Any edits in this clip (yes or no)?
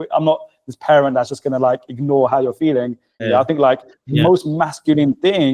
yes